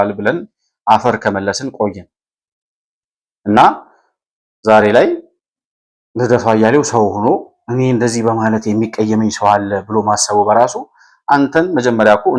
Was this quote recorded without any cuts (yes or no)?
yes